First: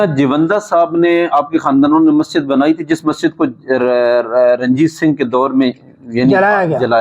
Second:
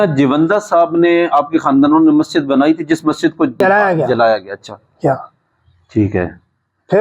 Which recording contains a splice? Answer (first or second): second